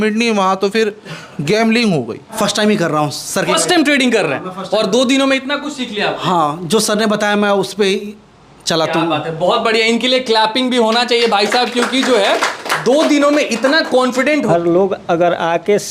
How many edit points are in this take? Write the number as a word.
two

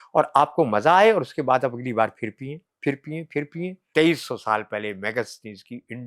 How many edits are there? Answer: one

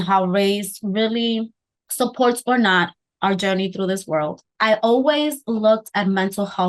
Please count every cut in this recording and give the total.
one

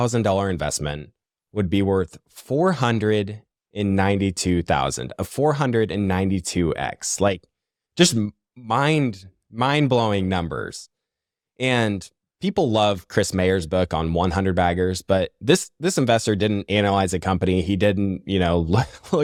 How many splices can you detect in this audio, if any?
zero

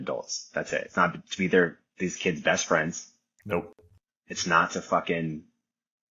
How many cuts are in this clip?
zero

